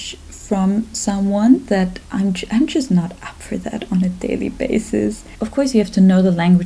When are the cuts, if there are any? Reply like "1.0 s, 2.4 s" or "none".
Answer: 5.4 s